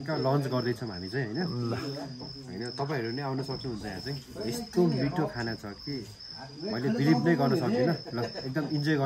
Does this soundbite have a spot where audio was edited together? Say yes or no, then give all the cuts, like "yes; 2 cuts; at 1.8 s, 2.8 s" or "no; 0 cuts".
no; 0 cuts